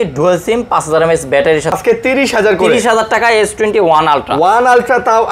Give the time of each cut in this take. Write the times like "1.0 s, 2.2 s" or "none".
1.7 s